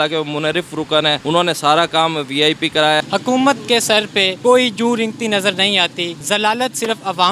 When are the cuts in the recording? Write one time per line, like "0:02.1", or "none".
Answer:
0:01.2
0:03.0
0:04.3
0:06.1

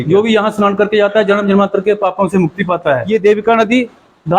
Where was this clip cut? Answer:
0:03.0

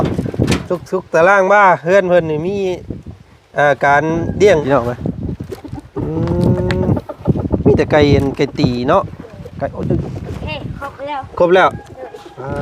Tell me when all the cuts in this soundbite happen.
0:04.6

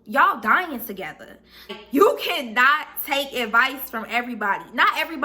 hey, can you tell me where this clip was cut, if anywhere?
0:01.8

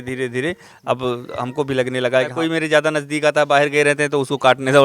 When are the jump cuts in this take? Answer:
0:02.3

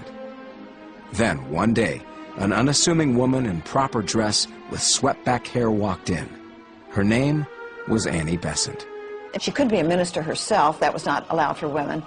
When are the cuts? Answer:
none

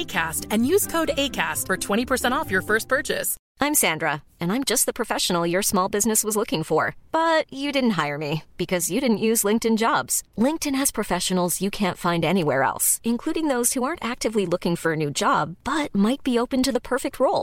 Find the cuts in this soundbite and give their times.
0:03.4

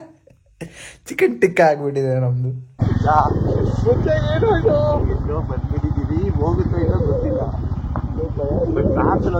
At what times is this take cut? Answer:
0:02.7

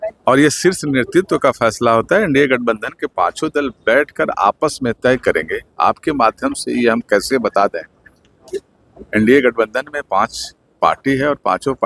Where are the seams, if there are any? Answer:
none

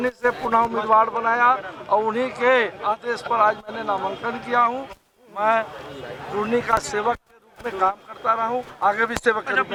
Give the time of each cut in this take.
none

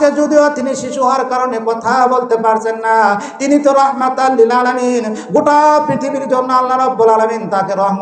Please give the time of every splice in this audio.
none

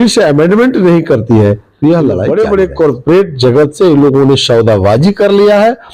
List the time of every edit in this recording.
0:02.2

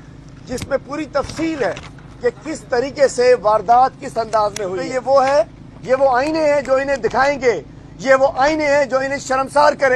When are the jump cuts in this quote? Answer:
0:04.8

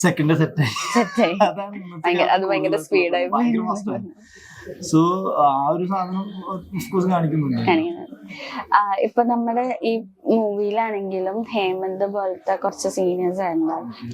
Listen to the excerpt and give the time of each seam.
none

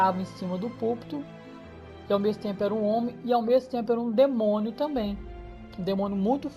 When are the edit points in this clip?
0:01.3

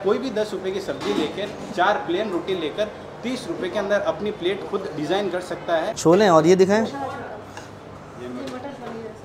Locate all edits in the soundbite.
0:05.9

